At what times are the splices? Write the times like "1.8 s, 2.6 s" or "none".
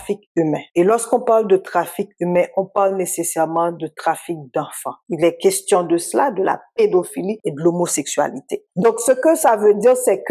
5.0 s, 8.5 s